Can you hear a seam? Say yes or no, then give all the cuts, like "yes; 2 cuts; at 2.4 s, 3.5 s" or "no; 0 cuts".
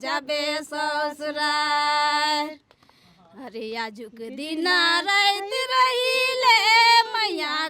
no; 0 cuts